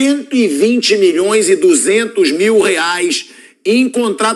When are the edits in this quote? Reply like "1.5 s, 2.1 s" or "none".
none